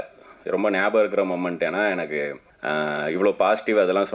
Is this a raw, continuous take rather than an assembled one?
no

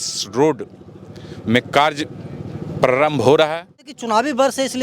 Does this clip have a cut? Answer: yes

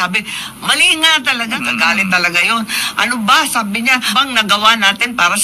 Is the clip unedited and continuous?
no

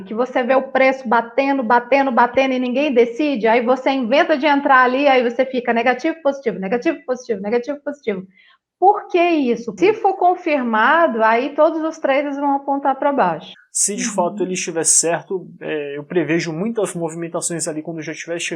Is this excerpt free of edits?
no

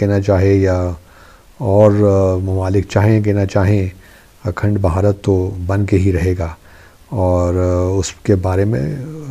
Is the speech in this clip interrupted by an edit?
no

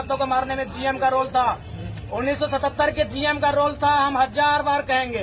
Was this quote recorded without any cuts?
yes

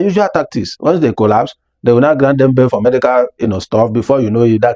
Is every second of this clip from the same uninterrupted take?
yes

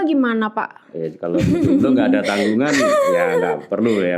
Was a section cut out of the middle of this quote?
no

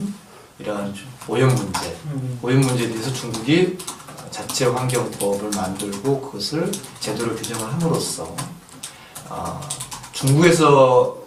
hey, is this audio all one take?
yes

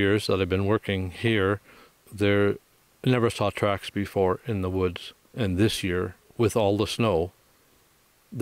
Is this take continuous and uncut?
yes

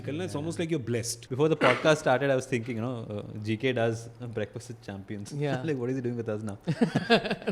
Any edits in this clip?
yes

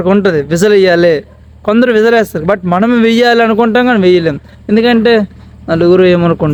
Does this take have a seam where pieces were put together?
no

